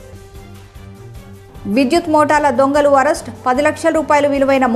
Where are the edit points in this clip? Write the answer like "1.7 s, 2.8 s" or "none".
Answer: none

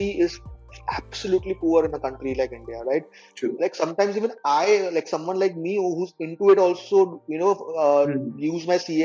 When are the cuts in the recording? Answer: none

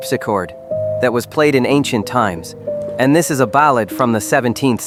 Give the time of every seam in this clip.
none

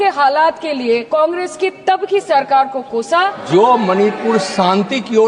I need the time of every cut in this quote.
1.0 s, 3.4 s

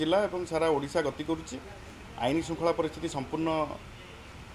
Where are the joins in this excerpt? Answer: none

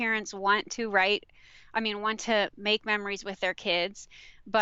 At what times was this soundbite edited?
none

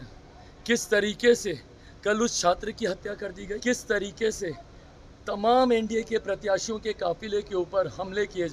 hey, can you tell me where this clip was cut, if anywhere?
3.6 s

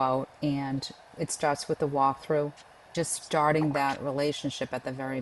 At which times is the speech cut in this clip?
1.0 s, 2.9 s

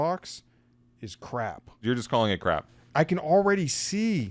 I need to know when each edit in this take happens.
1.7 s, 2.8 s

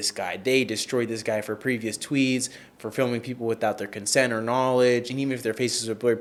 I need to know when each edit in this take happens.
none

